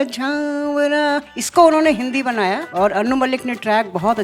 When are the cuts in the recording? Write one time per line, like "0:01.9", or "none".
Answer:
0:01.4
0:02.7